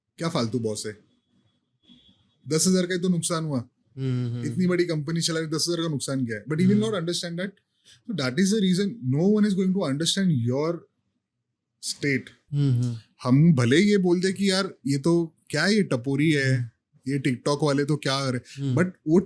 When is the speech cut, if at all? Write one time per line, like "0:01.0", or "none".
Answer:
0:12.4